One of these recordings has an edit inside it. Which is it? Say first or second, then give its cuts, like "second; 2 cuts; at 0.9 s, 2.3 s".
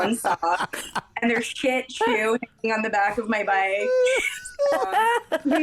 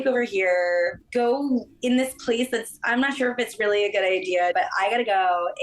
second; 2 cuts; at 1.0 s, 4.5 s